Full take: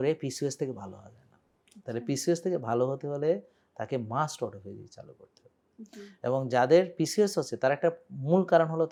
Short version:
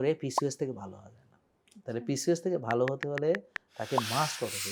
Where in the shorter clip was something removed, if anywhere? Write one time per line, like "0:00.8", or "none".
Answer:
none